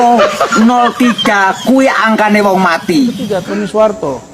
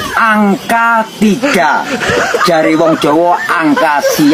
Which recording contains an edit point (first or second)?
first